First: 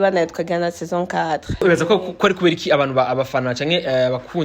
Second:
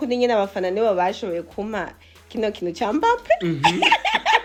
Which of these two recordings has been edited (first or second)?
first